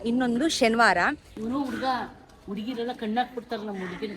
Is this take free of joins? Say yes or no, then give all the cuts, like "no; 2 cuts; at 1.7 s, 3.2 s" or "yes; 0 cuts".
no; 1 cut; at 1.3 s